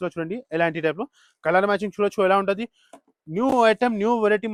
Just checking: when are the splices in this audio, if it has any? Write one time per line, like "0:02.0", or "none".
none